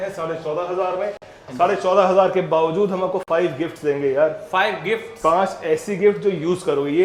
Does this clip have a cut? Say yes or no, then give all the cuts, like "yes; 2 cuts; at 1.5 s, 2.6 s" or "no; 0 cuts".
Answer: no; 0 cuts